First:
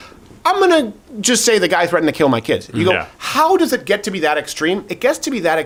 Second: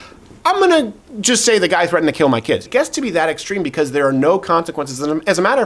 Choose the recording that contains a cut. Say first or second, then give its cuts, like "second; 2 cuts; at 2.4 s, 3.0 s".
second; 1 cut; at 2.6 s